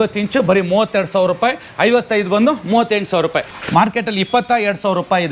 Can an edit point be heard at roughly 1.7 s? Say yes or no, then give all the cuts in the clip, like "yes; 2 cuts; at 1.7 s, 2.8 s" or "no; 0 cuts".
no; 1 cut; at 3.6 s